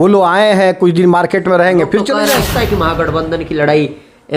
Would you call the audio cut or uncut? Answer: cut